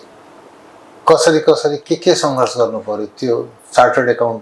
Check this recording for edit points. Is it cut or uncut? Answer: uncut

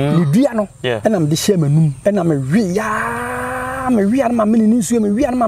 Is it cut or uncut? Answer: cut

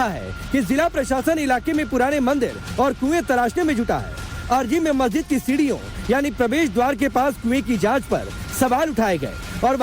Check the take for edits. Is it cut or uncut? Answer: cut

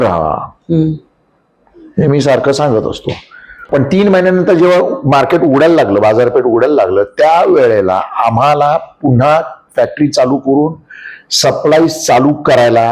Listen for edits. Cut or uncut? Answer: cut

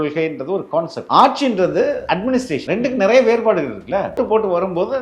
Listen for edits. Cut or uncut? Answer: cut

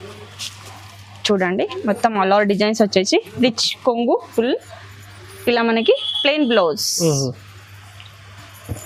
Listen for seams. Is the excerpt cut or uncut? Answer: uncut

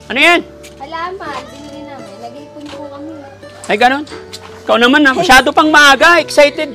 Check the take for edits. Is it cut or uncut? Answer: cut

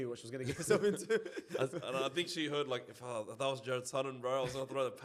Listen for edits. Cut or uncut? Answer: uncut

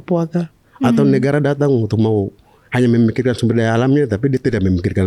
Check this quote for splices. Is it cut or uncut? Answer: uncut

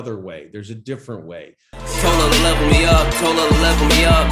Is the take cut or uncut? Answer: cut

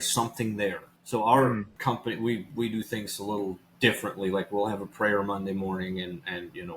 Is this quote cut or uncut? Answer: cut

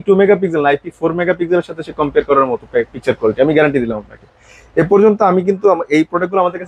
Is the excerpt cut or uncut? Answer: uncut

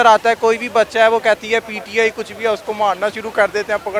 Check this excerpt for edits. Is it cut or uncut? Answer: uncut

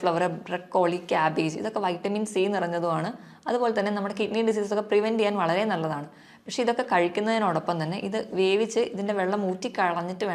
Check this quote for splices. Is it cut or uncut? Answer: uncut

